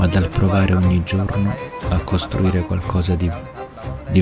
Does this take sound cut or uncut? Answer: uncut